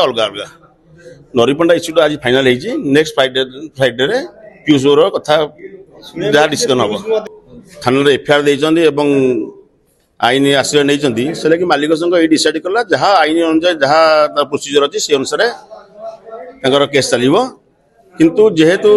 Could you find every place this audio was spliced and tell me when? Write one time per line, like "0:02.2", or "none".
0:07.2